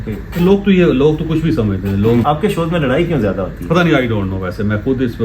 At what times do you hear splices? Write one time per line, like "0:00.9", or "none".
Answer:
0:02.2